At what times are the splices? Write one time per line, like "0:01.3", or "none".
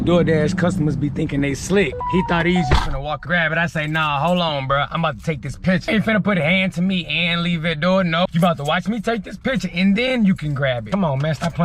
0:02.0
0:03.2
0:05.8
0:08.3
0:10.8